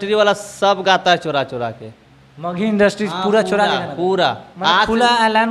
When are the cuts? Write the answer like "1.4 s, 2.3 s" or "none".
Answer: none